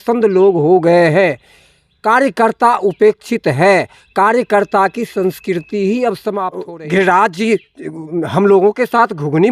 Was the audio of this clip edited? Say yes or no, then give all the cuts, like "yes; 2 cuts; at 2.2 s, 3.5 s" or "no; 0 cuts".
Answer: yes; 1 cut; at 6.6 s